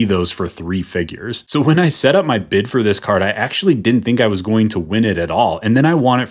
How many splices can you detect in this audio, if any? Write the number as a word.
one